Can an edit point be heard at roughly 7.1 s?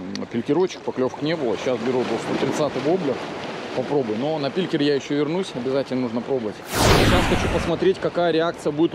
yes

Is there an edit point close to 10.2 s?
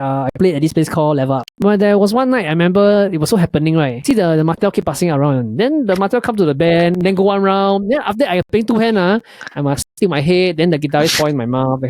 no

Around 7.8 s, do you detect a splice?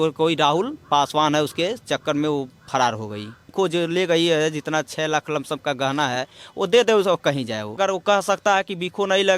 yes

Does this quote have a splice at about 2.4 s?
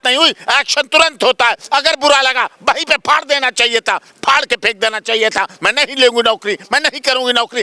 no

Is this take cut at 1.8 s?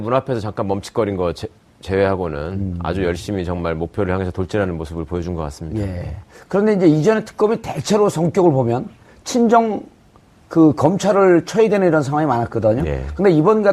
no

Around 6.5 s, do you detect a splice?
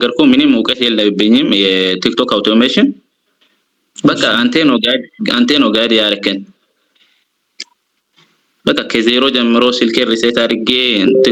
no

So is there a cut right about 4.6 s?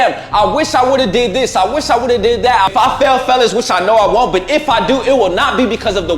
no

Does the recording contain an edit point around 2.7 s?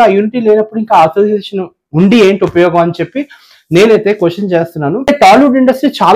no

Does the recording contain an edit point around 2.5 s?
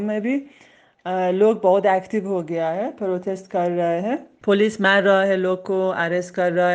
no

